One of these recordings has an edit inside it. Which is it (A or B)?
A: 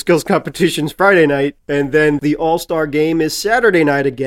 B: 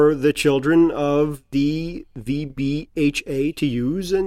A